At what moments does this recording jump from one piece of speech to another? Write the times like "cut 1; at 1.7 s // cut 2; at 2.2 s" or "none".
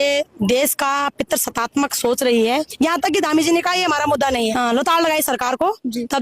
cut 1; at 2.7 s // cut 2; at 4.5 s